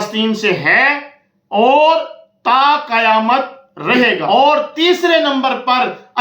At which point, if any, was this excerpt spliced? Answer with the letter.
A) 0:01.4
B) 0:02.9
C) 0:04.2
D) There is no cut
C